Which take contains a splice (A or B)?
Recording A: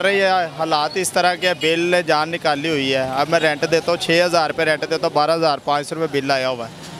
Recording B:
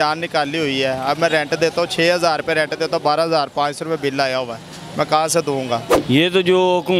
B